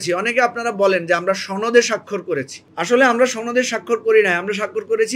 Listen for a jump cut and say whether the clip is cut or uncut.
uncut